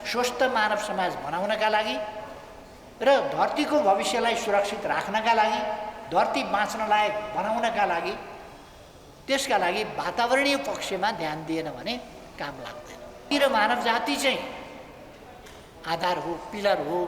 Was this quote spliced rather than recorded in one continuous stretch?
yes; 1 cut; at 13.3 s

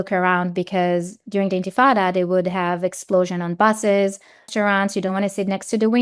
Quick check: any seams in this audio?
yes; 1 cut; at 4.5 s

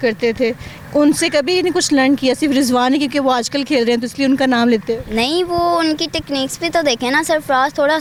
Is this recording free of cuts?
yes; 0 cuts

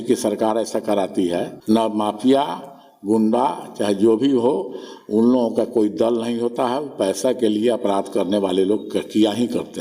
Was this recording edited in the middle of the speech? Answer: yes; 1 cut; at 1.5 s

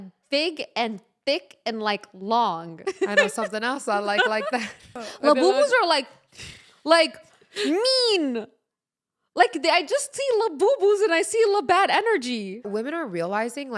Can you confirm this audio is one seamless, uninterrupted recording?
no; 3 cuts; at 2.7 s, 5.1 s, 12.7 s

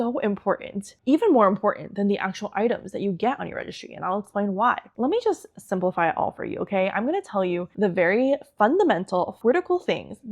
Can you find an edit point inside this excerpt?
yes; 3 cuts; at 4.9 s, 7.7 s, 9.3 s

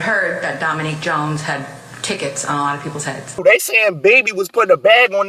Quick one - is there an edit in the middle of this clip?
yes; 1 cut; at 3.4 s

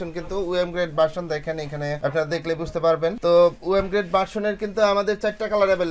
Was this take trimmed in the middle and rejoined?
no; 0 cuts

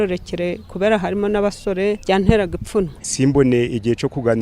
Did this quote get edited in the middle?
yes; 2 cuts; at 2.0 s, 3.0 s

